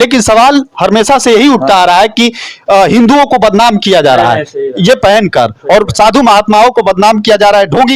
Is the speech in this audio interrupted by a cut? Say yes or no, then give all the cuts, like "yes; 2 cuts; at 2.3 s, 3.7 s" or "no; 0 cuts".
no; 0 cuts